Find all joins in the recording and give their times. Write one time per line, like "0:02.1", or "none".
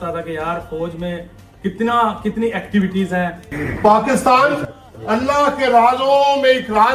0:03.4